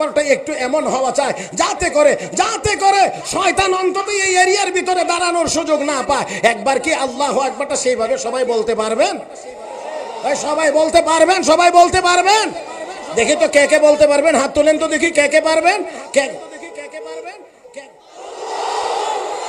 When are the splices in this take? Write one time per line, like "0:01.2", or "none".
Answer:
none